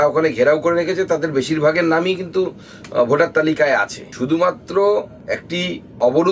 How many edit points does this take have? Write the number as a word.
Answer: zero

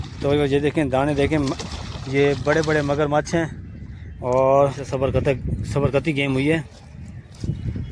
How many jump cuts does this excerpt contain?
one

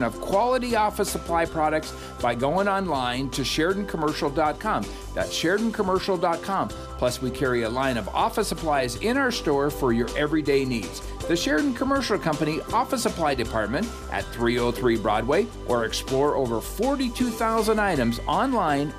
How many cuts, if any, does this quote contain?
zero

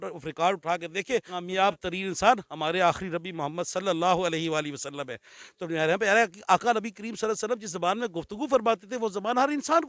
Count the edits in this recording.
one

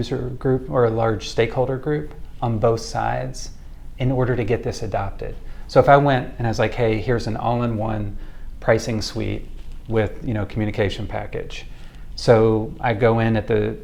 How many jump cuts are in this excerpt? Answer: zero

